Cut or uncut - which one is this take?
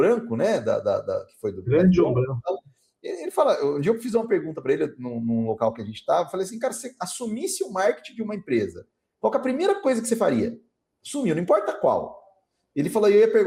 uncut